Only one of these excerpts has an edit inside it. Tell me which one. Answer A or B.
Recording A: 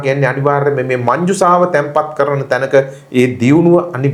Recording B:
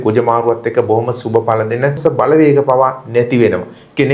B